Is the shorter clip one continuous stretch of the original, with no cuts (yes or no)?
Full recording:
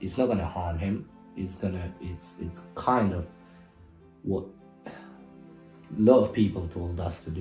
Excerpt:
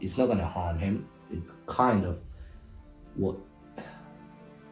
no